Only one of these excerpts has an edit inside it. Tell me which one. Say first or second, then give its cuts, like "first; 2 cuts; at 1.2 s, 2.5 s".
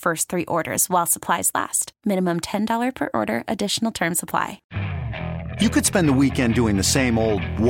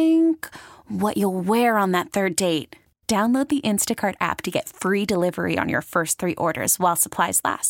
first; 1 cut; at 4.7 s